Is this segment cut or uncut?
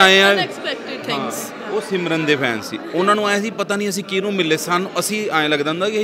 uncut